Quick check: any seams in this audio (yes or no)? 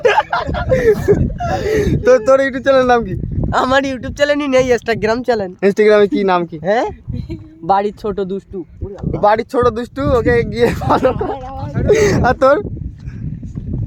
no